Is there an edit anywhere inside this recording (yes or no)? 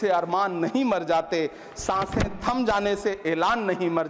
no